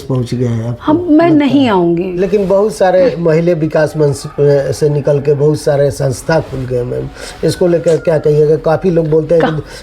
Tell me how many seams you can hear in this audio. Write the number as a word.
one